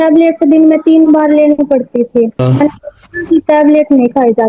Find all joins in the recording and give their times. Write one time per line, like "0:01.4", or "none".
0:02.4